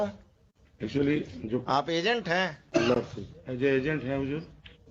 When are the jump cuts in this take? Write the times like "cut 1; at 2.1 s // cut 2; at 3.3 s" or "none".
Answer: none